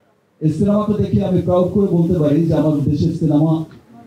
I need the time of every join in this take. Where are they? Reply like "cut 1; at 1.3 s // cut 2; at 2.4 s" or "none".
none